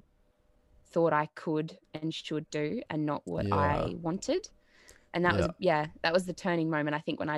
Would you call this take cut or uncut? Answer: uncut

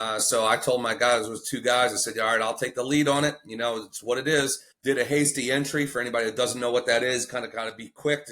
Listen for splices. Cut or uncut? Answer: cut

